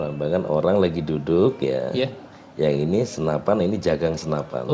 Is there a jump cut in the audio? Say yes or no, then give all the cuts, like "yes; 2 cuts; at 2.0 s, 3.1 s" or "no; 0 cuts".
no; 0 cuts